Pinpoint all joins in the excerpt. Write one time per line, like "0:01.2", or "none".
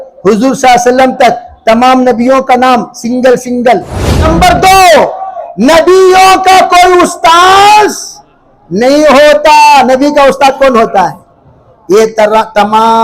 0:04.2